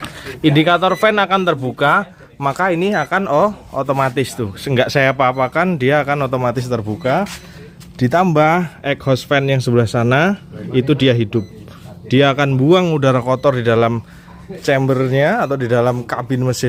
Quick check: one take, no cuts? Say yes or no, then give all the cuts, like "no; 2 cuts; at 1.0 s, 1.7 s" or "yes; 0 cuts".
yes; 0 cuts